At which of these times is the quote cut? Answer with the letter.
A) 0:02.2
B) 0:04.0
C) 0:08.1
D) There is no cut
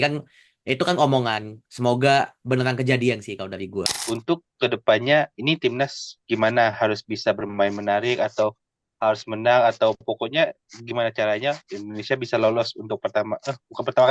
B